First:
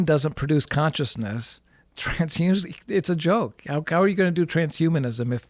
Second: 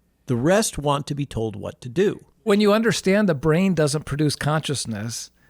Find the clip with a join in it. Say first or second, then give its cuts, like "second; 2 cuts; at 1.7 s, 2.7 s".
second; 1 cut; at 2.5 s